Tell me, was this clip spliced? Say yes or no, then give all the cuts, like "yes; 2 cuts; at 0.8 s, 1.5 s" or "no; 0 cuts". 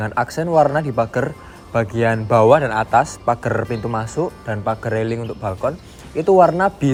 no; 0 cuts